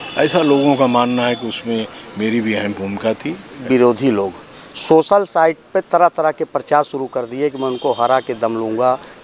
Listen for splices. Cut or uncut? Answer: cut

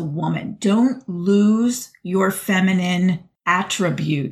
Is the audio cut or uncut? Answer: cut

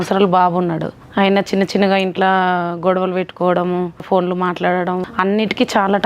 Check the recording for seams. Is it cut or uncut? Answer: cut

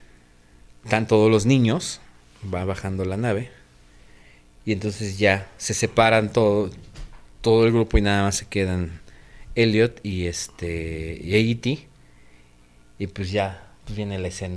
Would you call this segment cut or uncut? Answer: uncut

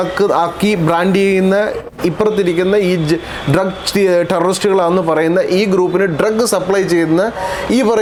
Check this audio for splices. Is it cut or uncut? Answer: uncut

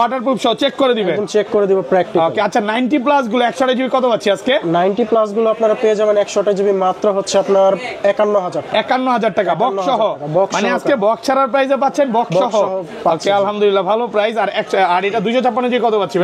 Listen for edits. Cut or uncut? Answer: uncut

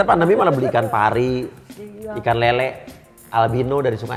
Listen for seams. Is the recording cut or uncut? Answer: uncut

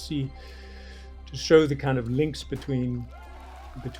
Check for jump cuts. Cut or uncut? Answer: uncut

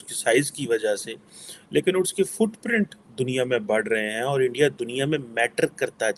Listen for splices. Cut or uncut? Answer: uncut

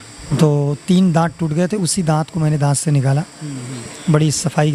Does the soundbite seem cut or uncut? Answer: uncut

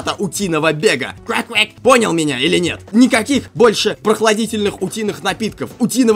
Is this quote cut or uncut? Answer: cut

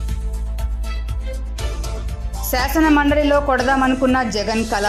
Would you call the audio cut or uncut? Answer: cut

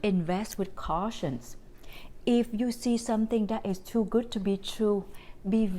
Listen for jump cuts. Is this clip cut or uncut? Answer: uncut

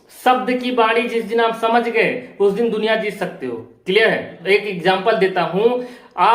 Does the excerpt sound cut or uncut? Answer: cut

